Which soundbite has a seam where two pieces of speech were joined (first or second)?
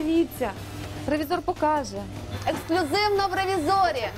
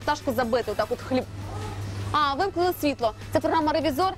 first